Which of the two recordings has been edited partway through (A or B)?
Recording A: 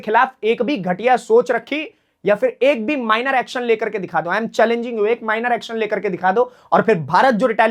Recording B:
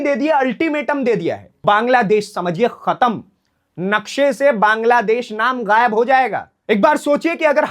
B